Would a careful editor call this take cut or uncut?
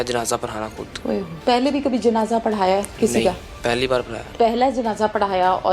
cut